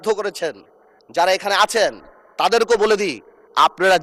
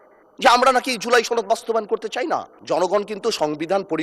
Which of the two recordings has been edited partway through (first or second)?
second